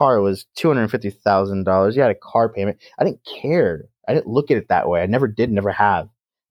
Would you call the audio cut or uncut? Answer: uncut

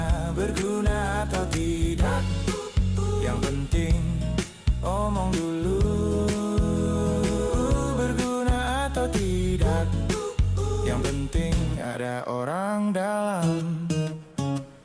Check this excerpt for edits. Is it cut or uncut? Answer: uncut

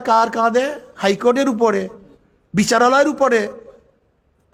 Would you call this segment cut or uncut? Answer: uncut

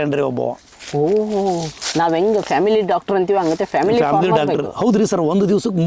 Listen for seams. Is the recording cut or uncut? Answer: uncut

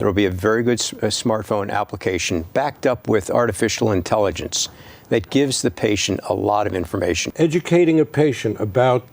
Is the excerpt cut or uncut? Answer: cut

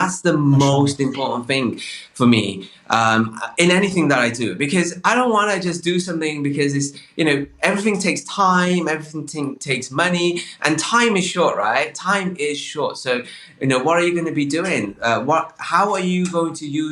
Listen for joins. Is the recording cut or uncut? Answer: uncut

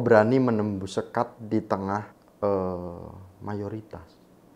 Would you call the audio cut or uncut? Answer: cut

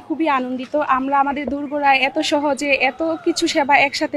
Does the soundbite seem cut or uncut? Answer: uncut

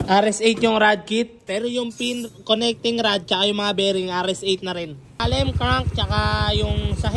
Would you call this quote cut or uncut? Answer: cut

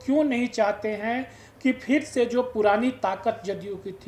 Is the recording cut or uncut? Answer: uncut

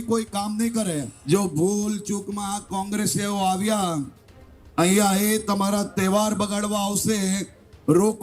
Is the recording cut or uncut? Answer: cut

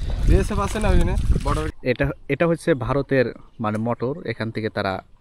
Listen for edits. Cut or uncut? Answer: cut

